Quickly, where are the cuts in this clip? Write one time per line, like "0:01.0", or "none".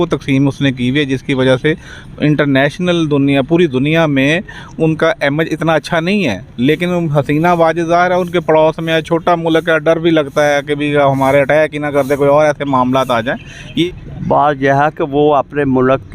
0:13.7

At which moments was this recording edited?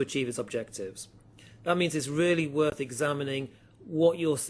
0:02.6

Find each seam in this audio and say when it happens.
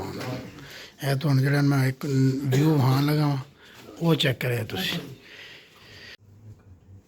0:06.1

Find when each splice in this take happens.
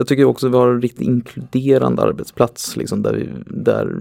none

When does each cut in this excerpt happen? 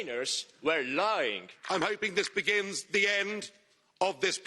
0:01.5

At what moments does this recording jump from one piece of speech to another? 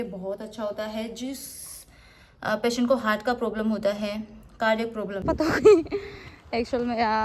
0:05.2

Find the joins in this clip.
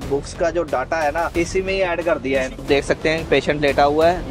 0:01.3
0:02.6

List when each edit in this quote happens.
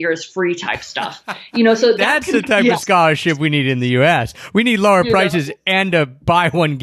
none

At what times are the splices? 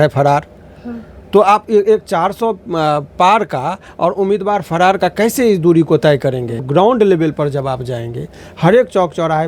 0:06.6

